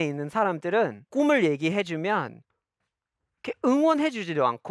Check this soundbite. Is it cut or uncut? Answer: cut